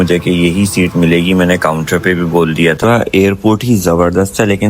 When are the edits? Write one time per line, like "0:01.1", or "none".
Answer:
0:02.8